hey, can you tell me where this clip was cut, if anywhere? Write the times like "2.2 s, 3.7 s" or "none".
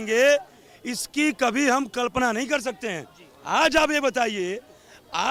none